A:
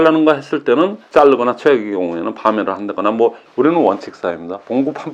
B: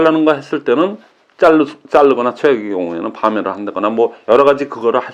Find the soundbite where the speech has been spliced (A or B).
A